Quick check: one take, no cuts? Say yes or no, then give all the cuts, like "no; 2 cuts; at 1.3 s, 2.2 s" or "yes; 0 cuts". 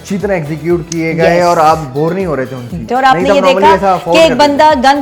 no; 1 cut; at 2.8 s